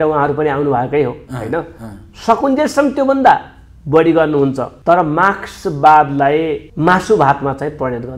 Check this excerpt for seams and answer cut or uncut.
cut